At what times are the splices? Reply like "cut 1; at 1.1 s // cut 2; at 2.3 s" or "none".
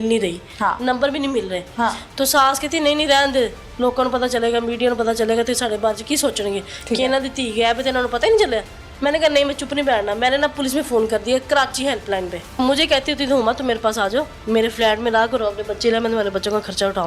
cut 1; at 8.8 s // cut 2; at 12.6 s // cut 3; at 14.4 s